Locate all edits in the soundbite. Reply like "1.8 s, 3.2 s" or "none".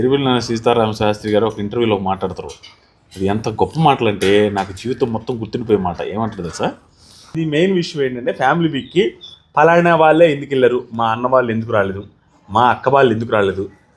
7.4 s